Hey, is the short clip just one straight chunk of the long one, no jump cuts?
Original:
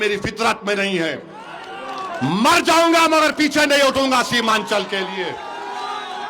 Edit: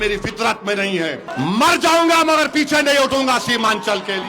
no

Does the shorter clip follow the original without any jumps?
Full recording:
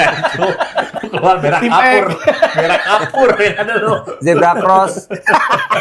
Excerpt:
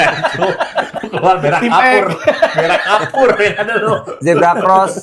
yes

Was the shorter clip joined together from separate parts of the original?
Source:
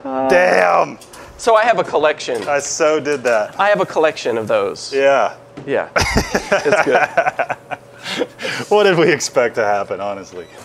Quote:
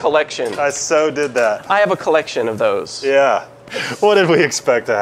yes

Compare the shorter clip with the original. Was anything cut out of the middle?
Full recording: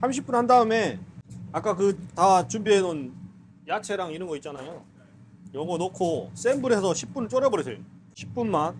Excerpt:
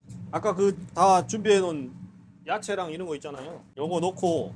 yes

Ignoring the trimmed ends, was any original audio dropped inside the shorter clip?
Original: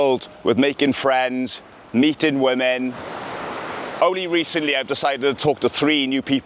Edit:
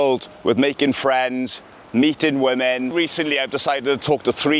yes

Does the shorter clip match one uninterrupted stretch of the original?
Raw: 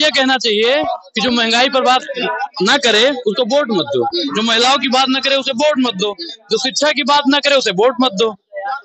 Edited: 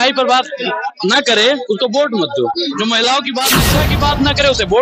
no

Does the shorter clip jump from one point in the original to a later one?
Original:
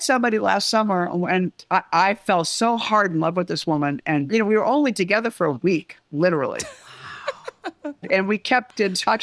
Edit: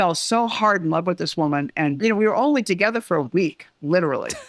no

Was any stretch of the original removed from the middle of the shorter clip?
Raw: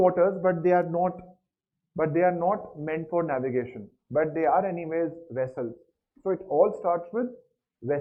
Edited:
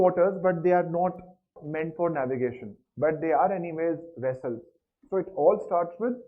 yes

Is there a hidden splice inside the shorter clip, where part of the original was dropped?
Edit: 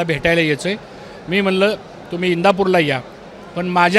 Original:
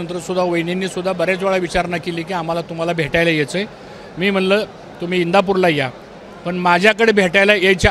no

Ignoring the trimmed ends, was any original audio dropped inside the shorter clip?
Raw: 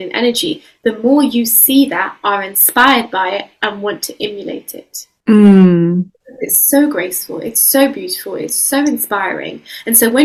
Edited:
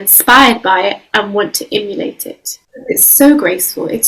yes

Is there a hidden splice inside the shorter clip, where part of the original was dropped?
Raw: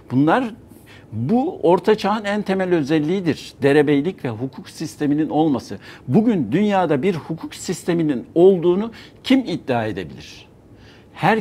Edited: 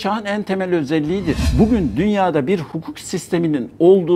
yes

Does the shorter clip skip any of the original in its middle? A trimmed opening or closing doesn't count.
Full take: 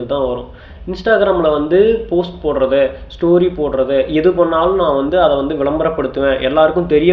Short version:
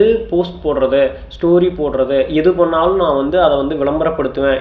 no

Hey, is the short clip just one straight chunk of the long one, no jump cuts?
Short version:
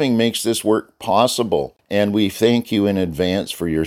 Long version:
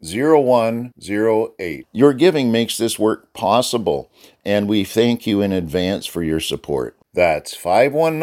no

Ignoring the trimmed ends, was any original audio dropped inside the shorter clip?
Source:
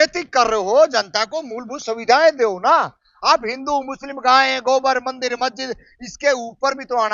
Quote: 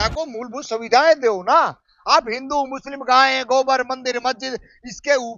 no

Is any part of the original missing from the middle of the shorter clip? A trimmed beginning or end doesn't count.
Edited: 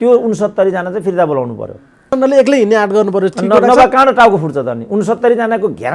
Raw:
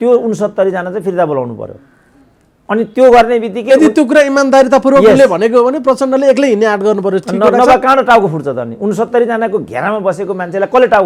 yes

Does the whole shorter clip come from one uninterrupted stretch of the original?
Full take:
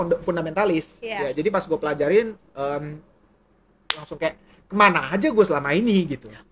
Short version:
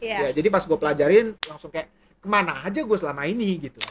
no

